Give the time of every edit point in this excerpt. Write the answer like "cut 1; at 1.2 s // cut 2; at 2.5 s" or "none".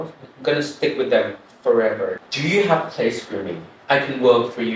cut 1; at 2.2 s